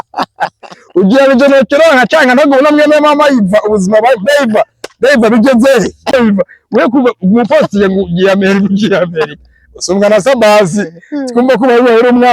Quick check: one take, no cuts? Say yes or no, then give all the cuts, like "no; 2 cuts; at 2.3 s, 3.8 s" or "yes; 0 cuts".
no; 1 cut; at 6.1 s